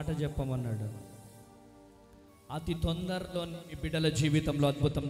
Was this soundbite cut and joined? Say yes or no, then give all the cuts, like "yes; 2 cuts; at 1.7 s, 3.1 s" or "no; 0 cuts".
no; 0 cuts